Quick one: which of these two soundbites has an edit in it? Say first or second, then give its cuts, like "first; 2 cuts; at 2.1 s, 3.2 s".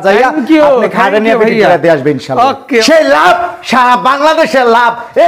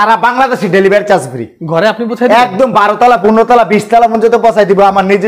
first; 1 cut; at 2.8 s